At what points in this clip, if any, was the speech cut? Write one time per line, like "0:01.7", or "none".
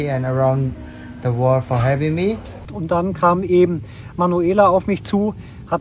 0:02.7